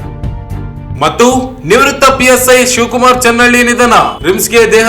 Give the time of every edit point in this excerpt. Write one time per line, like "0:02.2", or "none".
0:00.9